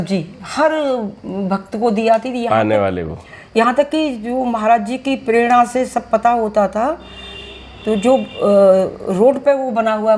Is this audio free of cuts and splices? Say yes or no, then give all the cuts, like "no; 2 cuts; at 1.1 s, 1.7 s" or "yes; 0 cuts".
yes; 0 cuts